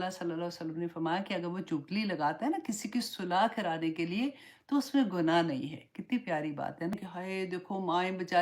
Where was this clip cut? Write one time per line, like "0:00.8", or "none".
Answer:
0:06.9